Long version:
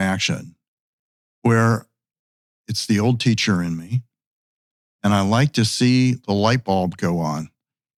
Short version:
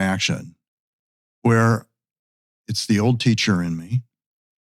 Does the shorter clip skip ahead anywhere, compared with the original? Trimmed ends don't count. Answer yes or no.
no